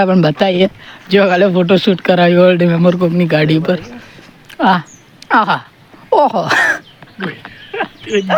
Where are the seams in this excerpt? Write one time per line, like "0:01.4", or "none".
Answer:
none